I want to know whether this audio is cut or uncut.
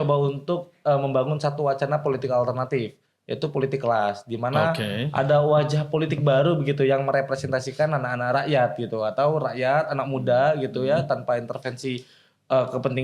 uncut